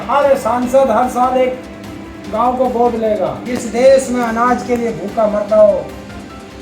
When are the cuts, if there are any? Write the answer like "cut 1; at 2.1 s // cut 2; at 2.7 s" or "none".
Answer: cut 1; at 3.5 s